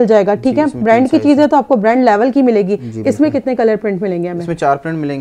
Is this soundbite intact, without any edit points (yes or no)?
yes